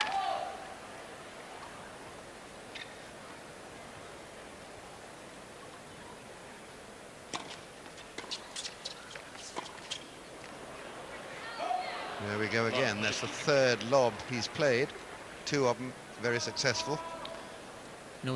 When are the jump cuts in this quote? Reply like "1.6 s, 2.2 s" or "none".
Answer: none